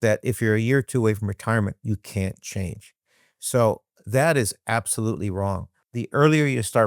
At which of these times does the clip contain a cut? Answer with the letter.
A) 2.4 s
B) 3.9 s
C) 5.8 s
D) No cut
C